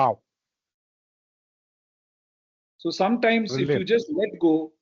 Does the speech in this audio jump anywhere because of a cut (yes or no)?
no